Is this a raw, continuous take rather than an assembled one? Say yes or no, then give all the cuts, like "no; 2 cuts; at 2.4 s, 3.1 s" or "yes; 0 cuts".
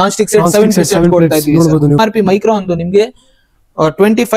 no; 1 cut; at 2.0 s